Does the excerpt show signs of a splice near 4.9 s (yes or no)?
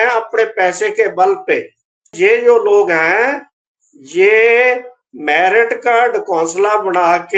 no